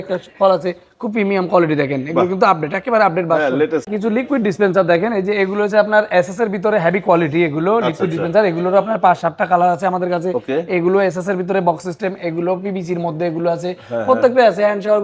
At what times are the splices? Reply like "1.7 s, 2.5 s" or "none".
3.9 s